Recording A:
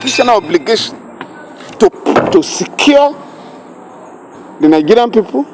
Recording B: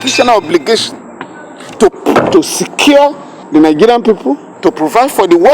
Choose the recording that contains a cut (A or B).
B